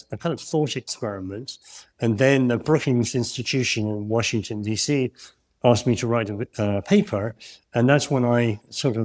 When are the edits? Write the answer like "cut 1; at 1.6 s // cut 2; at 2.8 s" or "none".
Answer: none